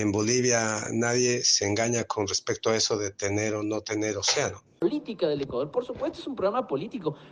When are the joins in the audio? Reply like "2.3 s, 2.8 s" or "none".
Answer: 4.7 s